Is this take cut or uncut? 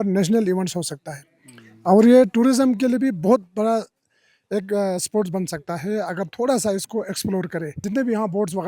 cut